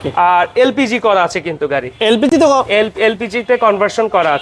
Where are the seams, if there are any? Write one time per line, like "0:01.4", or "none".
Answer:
none